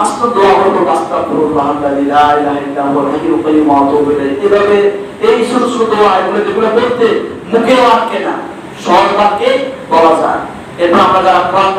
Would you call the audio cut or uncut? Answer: uncut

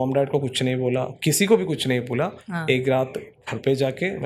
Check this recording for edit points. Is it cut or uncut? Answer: uncut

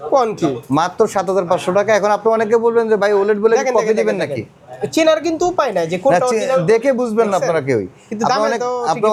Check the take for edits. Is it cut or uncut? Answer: uncut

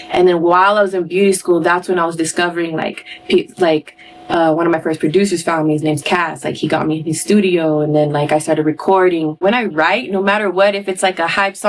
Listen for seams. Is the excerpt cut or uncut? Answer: cut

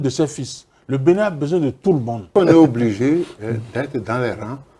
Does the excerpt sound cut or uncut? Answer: cut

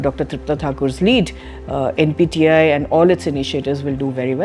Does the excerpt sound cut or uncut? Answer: uncut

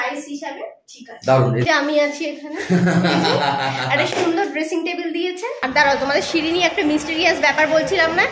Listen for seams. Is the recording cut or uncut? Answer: cut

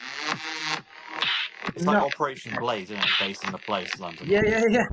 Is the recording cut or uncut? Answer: uncut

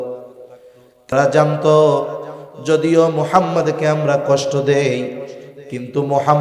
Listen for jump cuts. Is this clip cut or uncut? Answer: cut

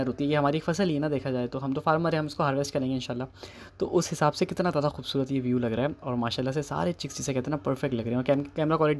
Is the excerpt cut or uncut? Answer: uncut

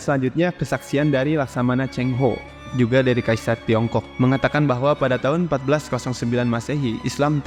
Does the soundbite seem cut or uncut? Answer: uncut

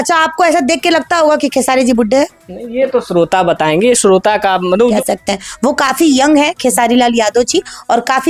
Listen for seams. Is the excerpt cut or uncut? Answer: cut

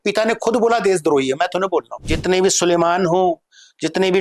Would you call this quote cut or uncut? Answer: cut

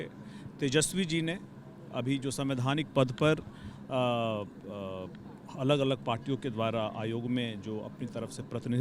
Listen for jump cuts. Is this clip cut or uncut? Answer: uncut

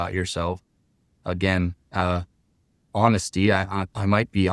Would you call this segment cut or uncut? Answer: uncut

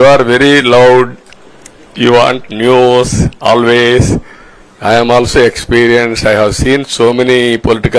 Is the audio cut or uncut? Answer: uncut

